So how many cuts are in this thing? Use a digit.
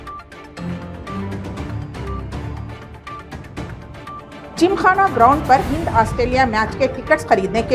1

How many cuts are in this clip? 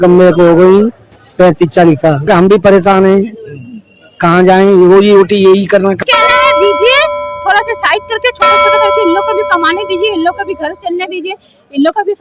2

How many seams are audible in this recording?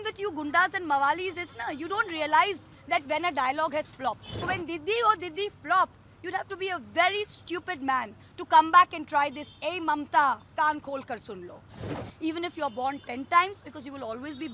2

